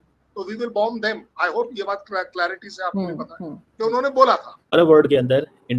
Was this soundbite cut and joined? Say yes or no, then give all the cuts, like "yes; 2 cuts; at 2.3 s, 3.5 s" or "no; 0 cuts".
yes; 1 cut; at 4.6 s